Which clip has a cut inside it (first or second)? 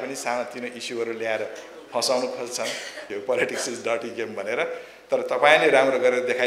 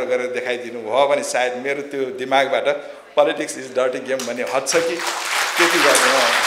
first